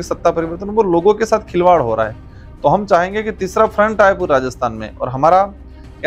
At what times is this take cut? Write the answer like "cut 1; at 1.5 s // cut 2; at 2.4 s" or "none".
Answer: none